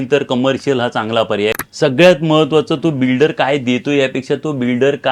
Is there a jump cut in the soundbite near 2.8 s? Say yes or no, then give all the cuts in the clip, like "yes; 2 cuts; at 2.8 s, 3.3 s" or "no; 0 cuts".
no; 1 cut; at 1.6 s